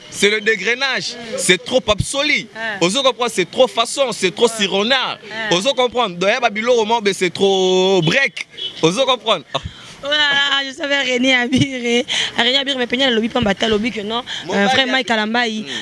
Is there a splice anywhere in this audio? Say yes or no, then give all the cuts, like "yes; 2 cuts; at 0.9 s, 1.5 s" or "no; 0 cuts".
no; 0 cuts